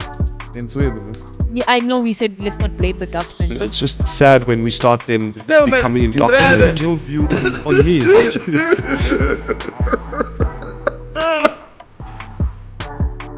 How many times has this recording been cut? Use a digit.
1